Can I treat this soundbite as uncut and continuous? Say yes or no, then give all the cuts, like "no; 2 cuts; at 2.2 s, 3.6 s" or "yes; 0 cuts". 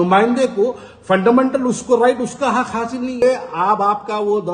no; 1 cut; at 3.2 s